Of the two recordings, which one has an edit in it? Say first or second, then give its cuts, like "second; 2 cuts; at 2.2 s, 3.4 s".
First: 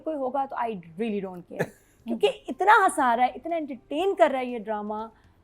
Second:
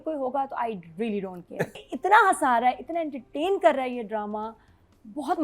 second; 1 cut; at 1.9 s